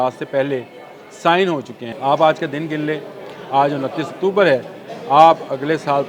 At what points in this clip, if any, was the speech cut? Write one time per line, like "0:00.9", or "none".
0:01.8